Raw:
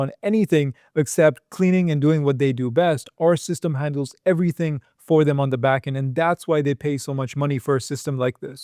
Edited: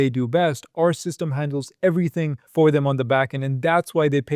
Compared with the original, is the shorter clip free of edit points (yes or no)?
no